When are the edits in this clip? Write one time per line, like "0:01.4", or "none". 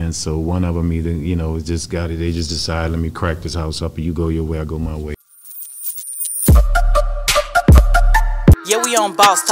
0:05.2